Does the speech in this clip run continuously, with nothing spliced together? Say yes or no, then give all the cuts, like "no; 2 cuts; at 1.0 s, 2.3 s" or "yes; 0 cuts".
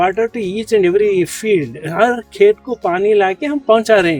yes; 0 cuts